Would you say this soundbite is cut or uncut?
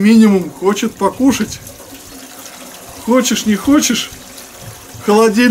uncut